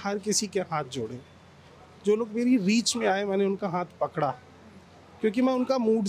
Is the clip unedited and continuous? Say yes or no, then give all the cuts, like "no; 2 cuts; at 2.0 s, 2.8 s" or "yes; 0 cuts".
yes; 0 cuts